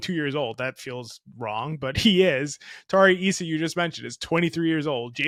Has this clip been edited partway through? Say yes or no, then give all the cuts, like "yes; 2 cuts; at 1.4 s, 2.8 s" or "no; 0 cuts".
no; 0 cuts